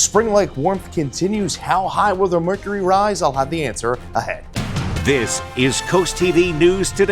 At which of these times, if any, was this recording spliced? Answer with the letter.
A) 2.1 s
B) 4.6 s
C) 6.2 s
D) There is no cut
B